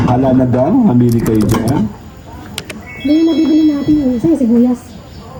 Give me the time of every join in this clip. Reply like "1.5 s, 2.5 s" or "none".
none